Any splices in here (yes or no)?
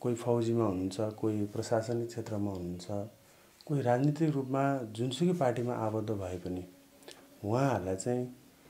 no